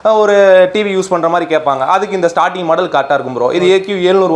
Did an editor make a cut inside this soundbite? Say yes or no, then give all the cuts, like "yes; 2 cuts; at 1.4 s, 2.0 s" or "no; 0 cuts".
no; 0 cuts